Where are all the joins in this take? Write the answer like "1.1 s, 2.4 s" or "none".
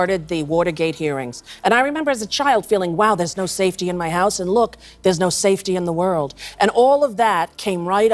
none